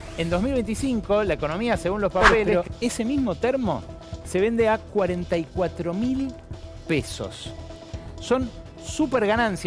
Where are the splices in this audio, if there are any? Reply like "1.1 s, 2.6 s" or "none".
2.5 s